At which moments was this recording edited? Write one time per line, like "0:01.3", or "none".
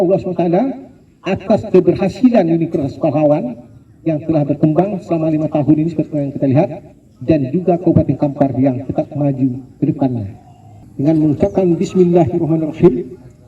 0:10.8